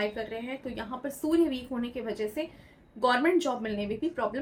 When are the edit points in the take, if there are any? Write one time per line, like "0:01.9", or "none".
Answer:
none